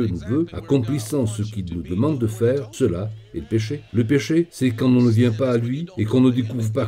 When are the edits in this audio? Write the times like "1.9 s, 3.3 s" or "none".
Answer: 3.8 s